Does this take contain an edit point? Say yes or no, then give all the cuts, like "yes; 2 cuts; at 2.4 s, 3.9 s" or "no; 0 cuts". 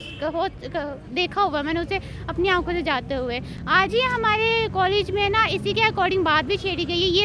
no; 0 cuts